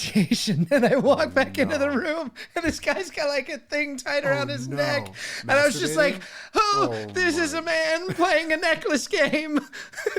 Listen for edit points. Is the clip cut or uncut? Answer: cut